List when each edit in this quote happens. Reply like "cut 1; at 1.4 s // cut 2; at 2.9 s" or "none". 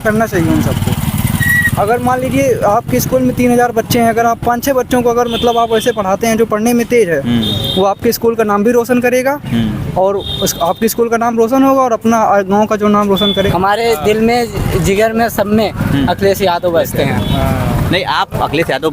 cut 1; at 13.5 s